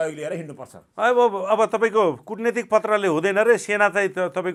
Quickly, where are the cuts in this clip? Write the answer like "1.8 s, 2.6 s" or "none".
none